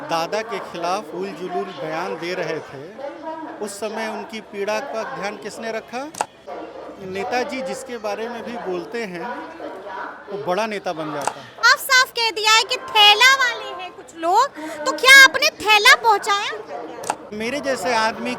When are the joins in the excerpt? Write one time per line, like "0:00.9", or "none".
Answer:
0:06.4
0:11.6
0:17.4